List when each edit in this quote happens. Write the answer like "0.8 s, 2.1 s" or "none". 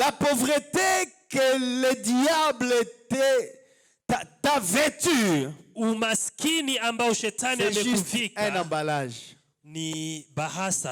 none